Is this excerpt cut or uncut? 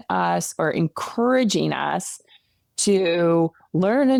uncut